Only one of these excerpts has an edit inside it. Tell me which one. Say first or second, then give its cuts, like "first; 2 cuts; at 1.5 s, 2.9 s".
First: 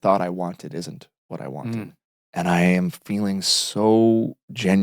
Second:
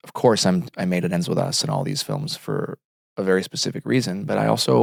first; 1 cut; at 2.0 s